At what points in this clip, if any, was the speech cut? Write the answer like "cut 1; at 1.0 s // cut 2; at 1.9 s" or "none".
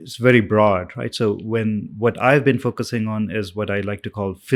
none